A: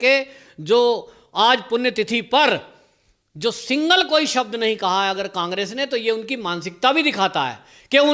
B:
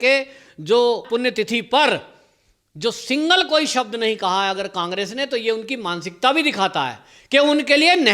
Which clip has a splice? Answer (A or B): B